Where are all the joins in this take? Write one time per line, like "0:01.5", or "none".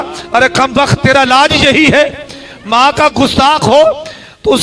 none